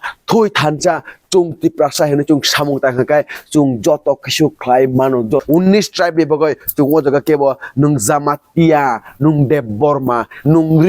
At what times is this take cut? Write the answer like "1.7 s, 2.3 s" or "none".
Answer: 5.4 s